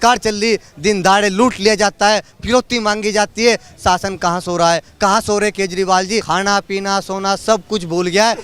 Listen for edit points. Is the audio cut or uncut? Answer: cut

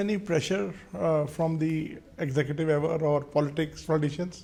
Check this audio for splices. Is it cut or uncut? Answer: uncut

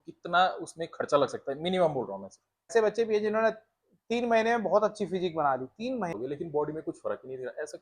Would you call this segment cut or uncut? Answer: cut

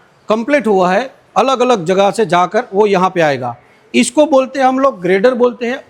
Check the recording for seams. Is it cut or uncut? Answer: uncut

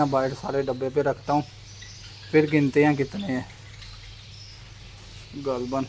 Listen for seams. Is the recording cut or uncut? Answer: uncut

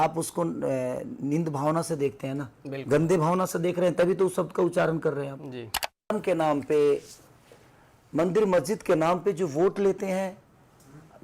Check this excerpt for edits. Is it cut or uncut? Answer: cut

